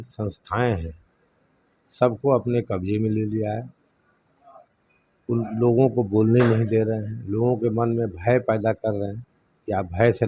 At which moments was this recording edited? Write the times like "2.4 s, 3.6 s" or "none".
none